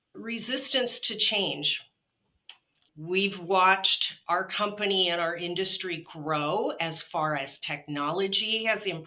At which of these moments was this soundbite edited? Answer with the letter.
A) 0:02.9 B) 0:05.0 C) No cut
A